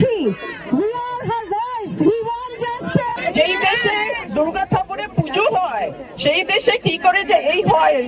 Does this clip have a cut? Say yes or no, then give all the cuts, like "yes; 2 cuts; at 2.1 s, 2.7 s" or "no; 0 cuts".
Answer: yes; 1 cut; at 3.2 s